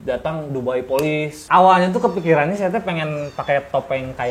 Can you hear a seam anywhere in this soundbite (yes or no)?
yes